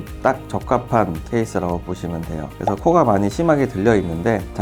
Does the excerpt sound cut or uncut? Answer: uncut